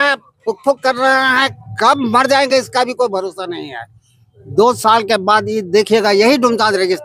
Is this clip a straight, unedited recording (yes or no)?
yes